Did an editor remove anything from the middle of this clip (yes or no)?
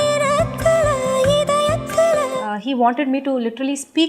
yes